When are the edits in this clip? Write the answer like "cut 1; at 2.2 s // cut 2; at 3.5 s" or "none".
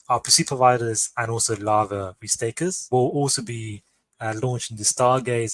cut 1; at 2.8 s